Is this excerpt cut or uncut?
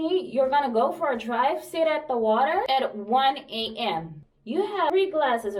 cut